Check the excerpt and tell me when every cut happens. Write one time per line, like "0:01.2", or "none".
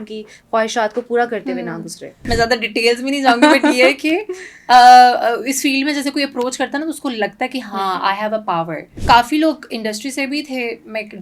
0:02.1
0:09.0